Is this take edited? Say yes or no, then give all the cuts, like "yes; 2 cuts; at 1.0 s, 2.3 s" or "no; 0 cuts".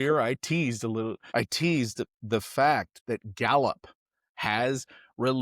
yes; 1 cut; at 1.2 s